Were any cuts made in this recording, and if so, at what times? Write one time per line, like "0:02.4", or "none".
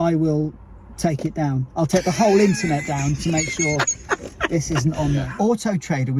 0:05.3